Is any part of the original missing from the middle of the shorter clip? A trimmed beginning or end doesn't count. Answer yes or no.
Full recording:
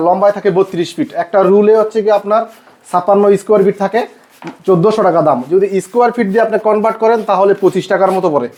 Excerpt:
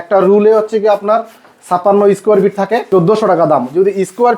yes